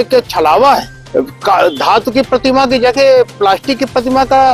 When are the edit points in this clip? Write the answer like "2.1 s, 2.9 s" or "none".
1.0 s

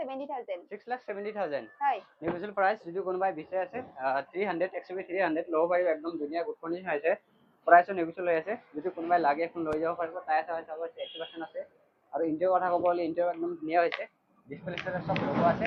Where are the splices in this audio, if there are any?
none

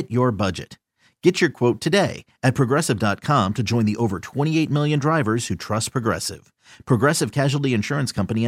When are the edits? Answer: none

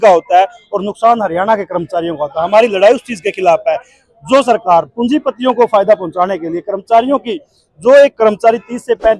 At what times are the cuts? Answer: none

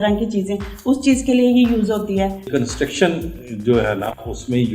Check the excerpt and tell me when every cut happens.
2.5 s

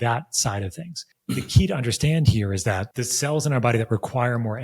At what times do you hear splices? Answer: 1.1 s, 2.9 s

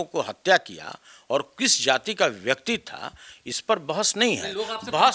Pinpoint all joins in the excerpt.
none

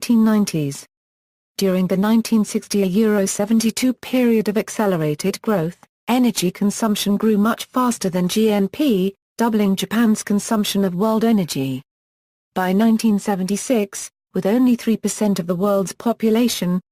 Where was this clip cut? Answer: 12.1 s

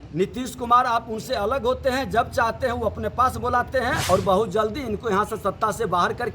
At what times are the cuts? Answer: 4.0 s

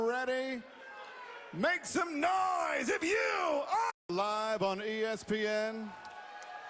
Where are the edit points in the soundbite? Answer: none

